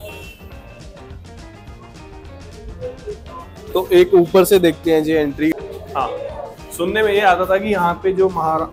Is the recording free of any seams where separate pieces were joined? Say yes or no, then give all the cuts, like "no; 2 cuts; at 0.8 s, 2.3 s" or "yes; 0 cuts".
no; 1 cut; at 5.5 s